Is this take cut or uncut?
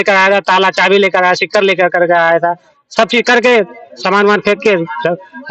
uncut